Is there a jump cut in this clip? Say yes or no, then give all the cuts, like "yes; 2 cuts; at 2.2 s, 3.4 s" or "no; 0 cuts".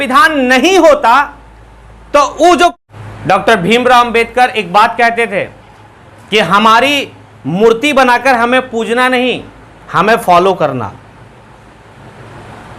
yes; 1 cut; at 2.9 s